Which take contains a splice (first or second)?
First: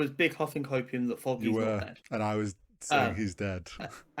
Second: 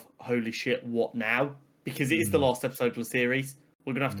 first